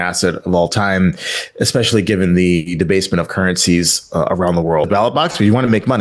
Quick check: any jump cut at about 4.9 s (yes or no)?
yes